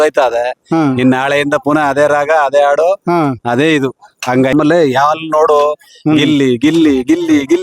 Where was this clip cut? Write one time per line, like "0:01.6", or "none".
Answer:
0:04.5